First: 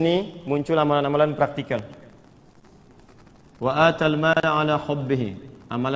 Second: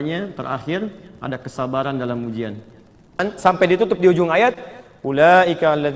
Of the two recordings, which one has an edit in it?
second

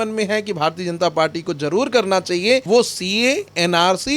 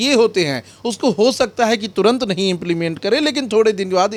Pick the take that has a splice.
first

